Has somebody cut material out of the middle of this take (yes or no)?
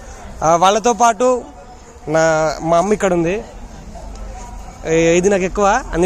no